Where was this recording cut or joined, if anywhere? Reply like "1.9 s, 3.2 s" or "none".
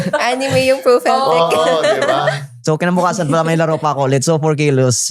2.5 s

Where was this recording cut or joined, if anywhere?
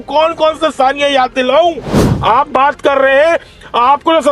none

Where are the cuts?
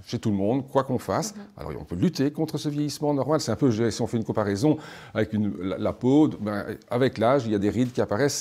none

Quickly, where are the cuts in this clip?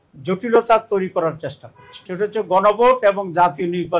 none

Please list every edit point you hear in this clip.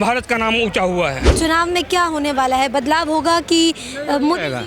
1.2 s

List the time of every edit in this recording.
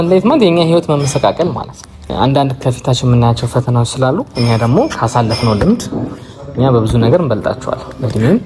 2.1 s

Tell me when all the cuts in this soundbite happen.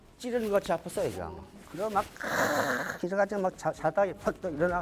none

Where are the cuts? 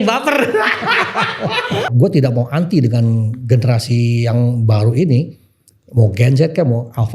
1.8 s

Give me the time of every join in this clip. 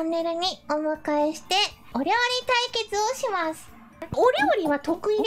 1.9 s, 4.1 s

